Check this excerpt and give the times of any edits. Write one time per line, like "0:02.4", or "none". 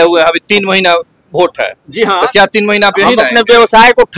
none